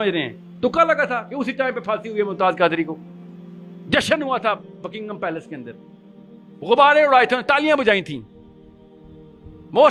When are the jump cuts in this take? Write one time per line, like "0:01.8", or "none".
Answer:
none